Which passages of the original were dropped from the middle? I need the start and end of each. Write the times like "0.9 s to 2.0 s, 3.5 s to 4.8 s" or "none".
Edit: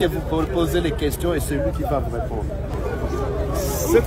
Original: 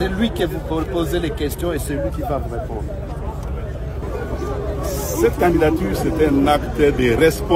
3.1 s to 4.0 s